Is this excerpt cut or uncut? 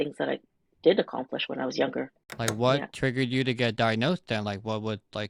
cut